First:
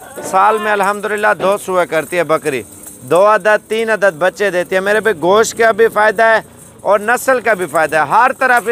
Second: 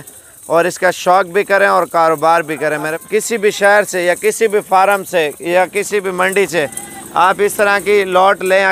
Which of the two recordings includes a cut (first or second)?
second